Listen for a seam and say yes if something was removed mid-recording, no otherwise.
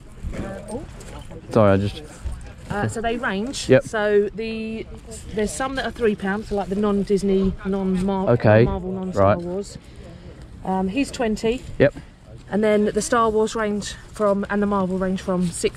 no